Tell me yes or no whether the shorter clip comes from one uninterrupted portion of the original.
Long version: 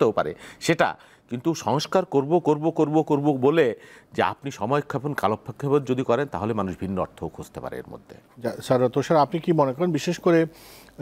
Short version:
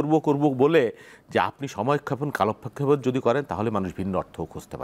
yes